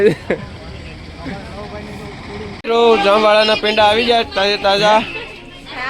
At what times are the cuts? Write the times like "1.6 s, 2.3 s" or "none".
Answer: 2.5 s